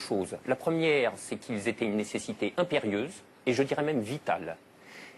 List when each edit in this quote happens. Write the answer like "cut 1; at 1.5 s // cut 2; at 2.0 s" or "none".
none